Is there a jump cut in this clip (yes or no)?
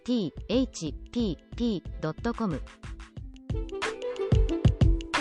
yes